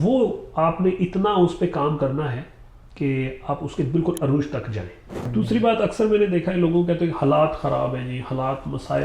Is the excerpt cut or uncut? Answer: cut